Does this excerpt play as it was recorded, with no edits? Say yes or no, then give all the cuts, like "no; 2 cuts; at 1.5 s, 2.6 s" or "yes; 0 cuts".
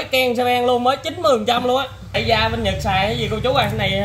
no; 1 cut; at 2.2 s